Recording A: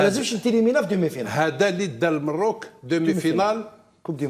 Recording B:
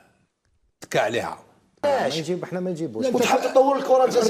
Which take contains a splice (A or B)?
B